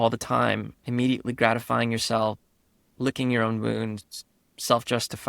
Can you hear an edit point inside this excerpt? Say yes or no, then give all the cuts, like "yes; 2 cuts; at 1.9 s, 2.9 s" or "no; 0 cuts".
yes; 1 cut; at 2.8 s